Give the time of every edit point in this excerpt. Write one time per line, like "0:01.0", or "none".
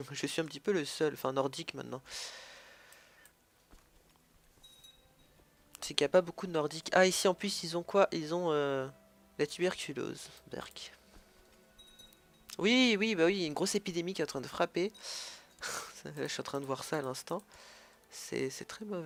none